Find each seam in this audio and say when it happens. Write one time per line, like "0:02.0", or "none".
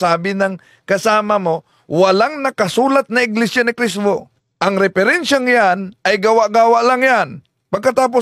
0:04.4

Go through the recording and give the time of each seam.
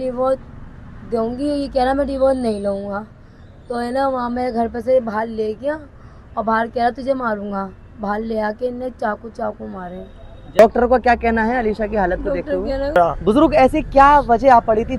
0:10.6
0:13.0

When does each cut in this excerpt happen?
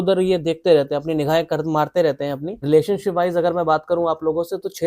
0:02.6

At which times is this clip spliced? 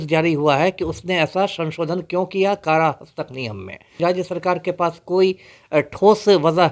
0:04.0

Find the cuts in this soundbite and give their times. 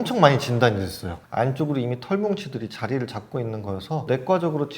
0:01.1

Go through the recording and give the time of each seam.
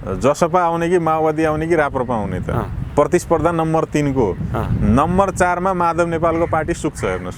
none

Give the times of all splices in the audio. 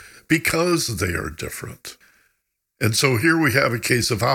0:01.9

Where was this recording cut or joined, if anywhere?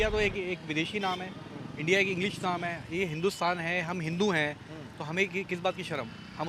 none

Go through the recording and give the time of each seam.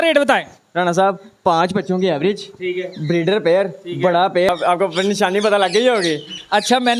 0:04.5

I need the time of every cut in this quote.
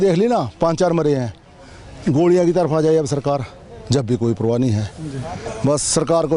none

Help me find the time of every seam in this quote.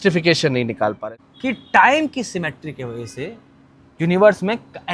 0:01.0

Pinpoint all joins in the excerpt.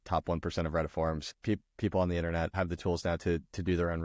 0:02.6

